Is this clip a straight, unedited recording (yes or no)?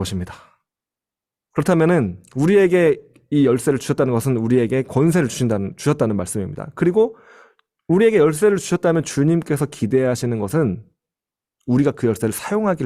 yes